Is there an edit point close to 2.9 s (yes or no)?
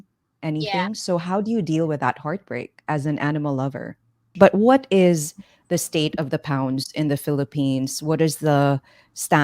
no